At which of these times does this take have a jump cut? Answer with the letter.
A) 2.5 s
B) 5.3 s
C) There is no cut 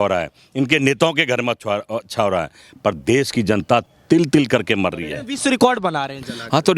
B